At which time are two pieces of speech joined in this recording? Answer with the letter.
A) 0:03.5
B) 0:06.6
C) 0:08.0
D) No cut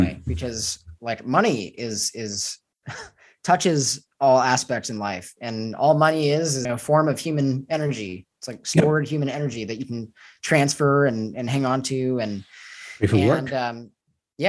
B